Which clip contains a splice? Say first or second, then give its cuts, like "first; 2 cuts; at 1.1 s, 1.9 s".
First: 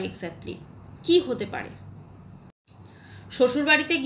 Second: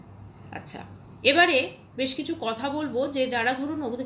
first; 1 cut; at 2.6 s